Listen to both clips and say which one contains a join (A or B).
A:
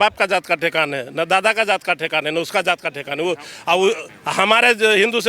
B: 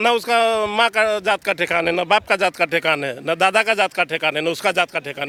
A